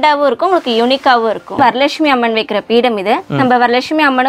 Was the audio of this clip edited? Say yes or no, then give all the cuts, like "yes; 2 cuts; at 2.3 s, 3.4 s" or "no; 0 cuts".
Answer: yes; 1 cut; at 1.6 s